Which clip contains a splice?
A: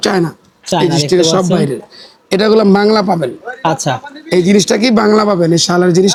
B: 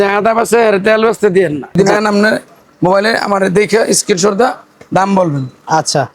B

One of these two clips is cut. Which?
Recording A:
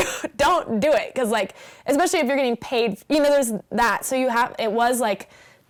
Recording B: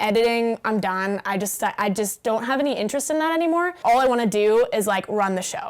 B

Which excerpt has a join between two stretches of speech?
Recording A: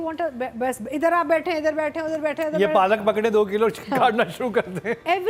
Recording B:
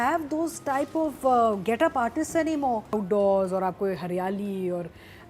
B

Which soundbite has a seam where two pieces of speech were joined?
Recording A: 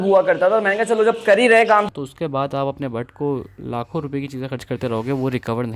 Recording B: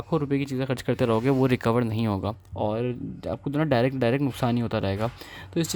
A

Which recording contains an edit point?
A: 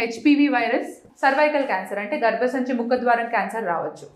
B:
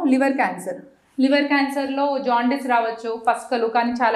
A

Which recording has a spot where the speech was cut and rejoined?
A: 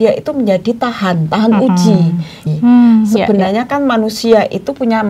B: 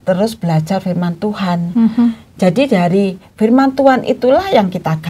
A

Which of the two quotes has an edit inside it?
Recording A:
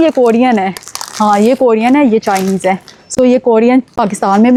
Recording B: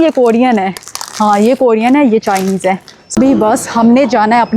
B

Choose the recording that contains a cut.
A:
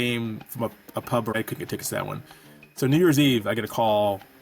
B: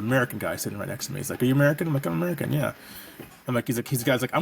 A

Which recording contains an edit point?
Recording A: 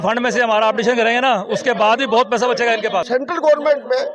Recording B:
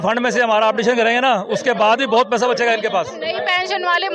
A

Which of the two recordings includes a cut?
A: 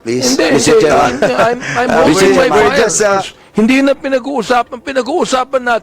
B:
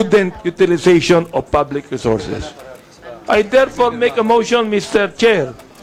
A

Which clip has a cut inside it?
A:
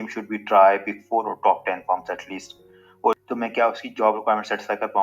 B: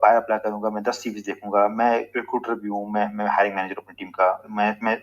A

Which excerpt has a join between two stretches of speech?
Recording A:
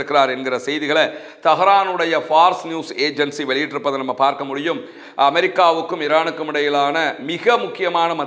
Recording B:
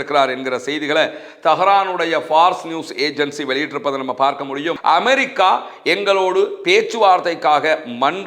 B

